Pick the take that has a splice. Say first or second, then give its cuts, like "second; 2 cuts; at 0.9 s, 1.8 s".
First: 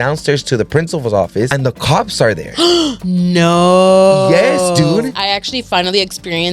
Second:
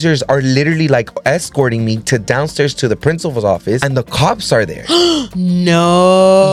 first; 1 cut; at 5.2 s